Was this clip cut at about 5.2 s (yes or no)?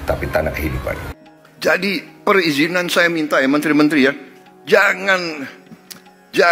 no